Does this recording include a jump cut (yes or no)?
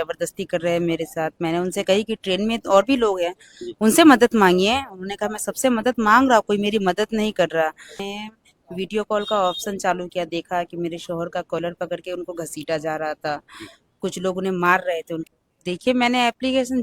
yes